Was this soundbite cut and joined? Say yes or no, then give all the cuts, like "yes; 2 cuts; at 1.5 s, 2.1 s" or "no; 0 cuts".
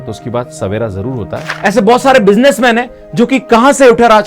yes; 1 cut; at 1.6 s